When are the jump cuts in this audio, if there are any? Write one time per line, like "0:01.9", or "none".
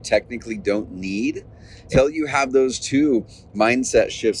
0:01.8